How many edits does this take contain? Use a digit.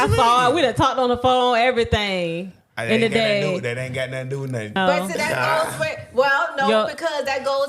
1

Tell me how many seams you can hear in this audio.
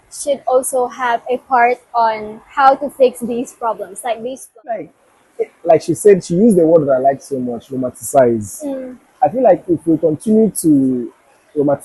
1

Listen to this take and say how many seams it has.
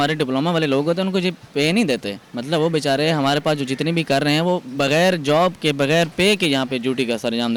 0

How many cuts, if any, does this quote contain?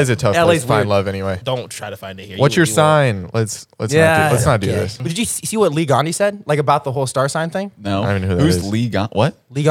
2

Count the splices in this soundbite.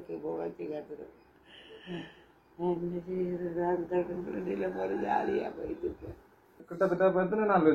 1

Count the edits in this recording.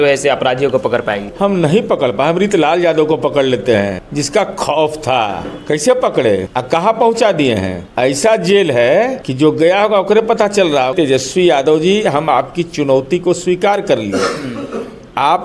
7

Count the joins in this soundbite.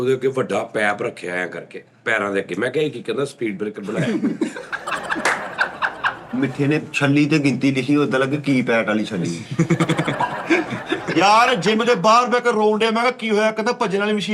2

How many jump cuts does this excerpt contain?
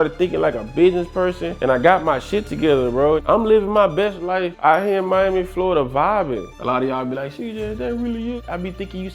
3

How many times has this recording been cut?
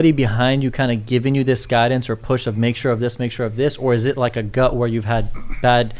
0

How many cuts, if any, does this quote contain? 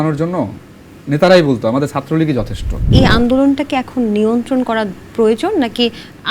1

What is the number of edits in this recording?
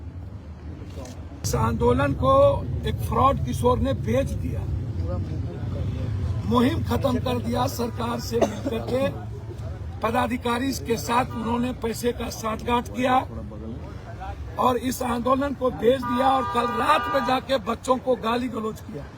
1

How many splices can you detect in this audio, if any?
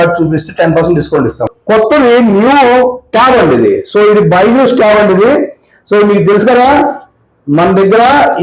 1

